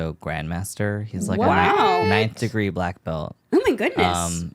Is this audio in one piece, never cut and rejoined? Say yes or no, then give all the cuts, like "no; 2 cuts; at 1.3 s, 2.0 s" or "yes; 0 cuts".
no; 1 cut; at 3.3 s